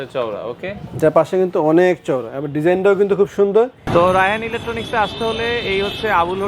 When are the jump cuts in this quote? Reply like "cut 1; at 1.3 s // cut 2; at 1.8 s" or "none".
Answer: cut 1; at 3.8 s